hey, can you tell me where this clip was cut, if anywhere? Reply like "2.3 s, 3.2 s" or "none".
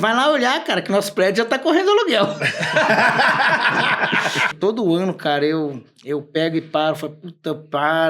4.5 s

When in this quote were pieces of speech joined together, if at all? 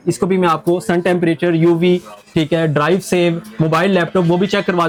none

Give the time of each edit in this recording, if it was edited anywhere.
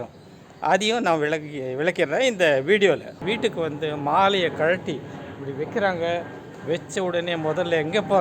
3.2 s

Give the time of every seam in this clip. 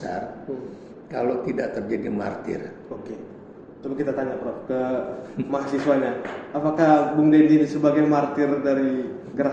none

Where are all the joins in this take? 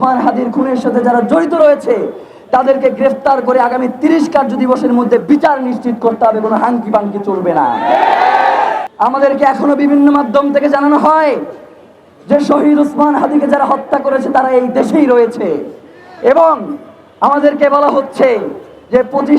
8.8 s

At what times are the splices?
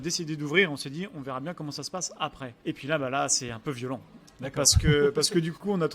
none

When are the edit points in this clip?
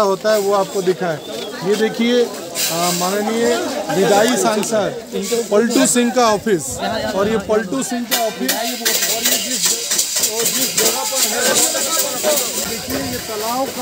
12.7 s

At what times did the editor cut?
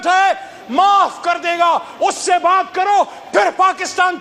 none

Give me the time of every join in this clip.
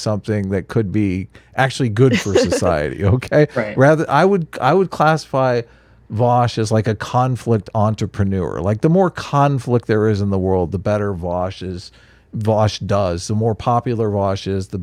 none

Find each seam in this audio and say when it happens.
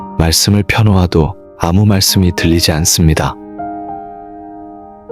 3.7 s

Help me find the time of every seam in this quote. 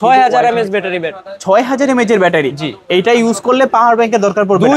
none

